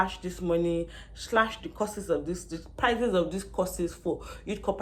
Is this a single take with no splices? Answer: yes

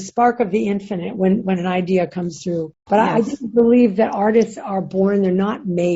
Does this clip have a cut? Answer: no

